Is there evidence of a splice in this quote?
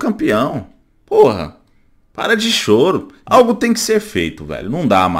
yes; 1 cut; at 3.1 s

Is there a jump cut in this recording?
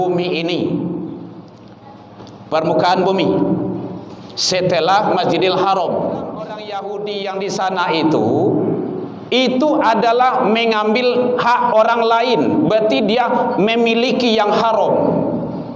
yes; 1 cut; at 6.7 s

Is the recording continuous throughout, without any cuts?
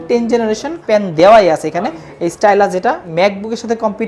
no; 2 cuts; at 0.8 s, 3.1 s

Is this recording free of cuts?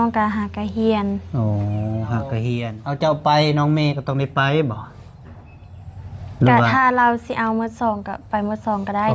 no; 1 cut; at 2.7 s

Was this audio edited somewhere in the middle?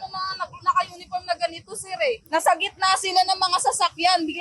yes; 1 cut; at 2.2 s

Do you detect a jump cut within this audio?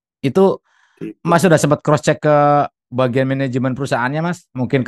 no; 0 cuts

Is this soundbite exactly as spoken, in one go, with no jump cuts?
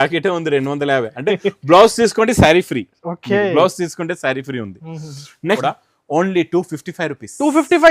no; 1 cut; at 5.6 s

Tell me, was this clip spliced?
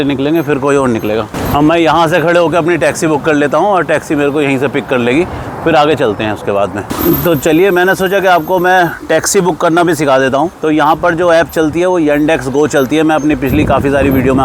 no; 0 cuts

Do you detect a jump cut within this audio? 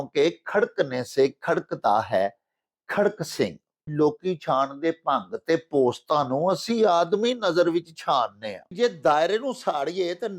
yes; 2 cuts; at 3.8 s, 8.7 s

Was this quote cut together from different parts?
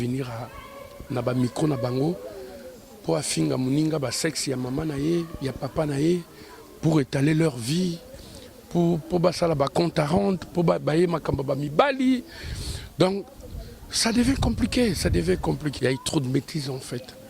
yes; 1 cut; at 15.7 s

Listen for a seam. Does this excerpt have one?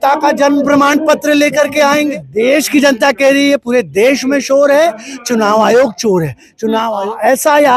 yes; 2 cuts; at 2.2 s, 6.9 s

